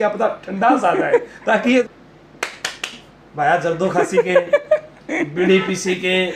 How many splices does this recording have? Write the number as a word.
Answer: one